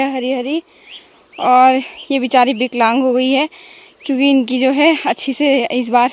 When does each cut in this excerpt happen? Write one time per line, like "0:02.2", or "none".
none